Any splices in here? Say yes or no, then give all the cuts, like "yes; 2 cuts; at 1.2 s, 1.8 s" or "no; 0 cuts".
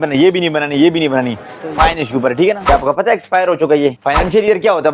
yes; 2 cuts; at 2.7 s, 4.0 s